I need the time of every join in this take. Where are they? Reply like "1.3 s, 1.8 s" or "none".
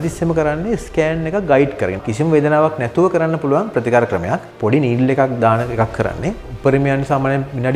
2.0 s, 4.5 s, 6.5 s